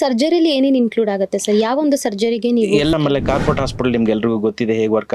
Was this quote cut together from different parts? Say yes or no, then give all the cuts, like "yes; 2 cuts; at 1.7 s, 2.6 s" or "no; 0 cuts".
yes; 1 cut; at 2.9 s